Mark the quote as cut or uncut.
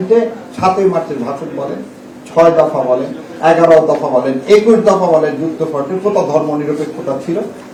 uncut